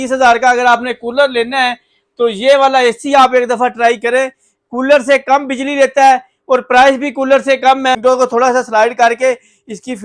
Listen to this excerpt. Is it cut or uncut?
cut